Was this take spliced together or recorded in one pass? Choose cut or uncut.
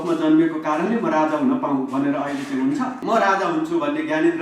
cut